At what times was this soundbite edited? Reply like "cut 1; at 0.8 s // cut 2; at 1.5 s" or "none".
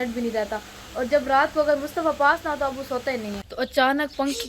cut 1; at 3.4 s